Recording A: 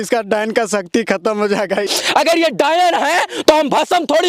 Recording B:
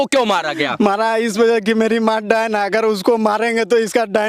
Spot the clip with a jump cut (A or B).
A